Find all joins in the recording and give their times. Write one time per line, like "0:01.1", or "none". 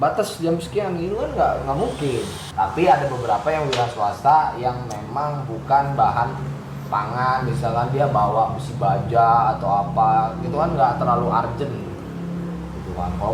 none